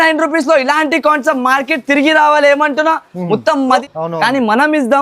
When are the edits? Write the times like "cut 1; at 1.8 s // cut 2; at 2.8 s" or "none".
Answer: cut 1; at 3.8 s